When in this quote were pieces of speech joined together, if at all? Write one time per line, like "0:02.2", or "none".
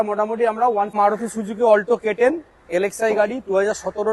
0:01.0